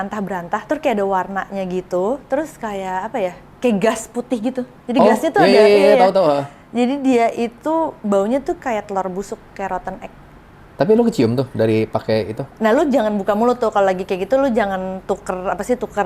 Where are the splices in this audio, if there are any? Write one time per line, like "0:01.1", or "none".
none